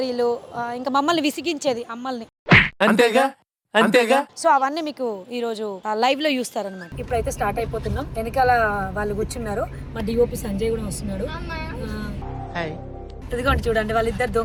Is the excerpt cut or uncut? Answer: uncut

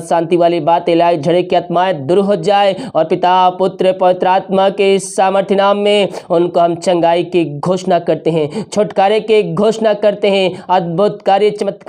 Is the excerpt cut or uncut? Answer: uncut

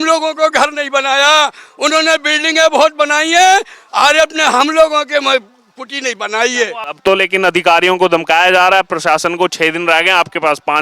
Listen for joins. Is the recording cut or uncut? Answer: cut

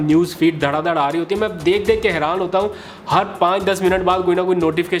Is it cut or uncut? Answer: uncut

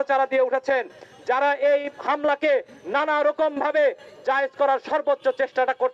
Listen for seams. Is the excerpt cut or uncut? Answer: uncut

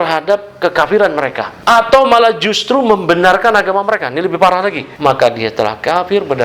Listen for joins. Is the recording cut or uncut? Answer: cut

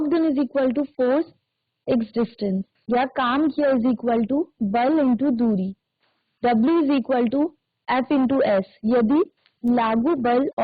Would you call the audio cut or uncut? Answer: cut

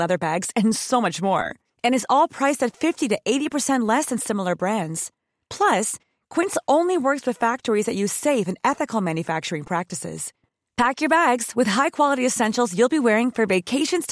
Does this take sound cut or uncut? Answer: uncut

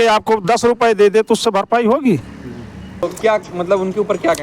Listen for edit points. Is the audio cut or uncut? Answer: cut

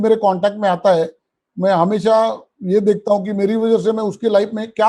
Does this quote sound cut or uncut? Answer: uncut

